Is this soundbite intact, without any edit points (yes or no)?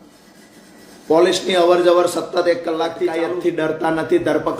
no